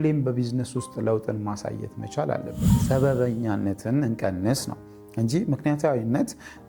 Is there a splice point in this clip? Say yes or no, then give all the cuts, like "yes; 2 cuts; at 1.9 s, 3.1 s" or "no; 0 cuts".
yes; 1 cut; at 2.7 s